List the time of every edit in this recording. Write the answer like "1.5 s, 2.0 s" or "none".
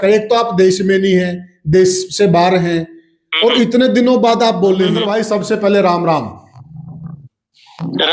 5.0 s